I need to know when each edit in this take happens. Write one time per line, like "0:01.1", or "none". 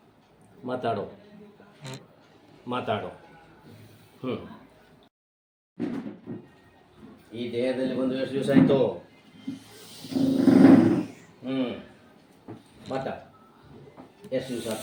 none